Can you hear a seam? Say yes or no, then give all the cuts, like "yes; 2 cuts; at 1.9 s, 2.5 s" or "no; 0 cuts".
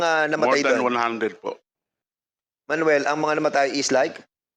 yes; 1 cut; at 2.3 s